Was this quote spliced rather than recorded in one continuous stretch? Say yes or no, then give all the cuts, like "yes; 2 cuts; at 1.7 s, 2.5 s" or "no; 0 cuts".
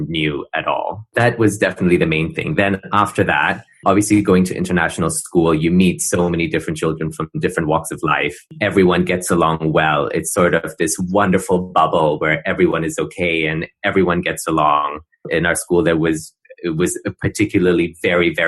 no; 0 cuts